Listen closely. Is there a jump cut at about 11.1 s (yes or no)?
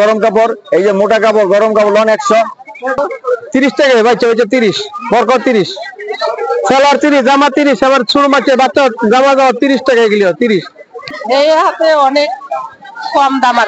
yes